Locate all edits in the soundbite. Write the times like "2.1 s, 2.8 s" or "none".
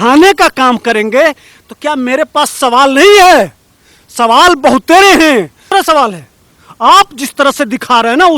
5.7 s